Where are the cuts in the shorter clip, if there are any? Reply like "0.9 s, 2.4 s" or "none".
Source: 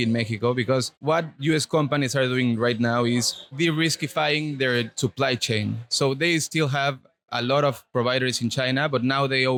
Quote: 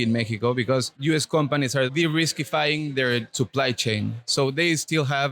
0.9 s, 1.9 s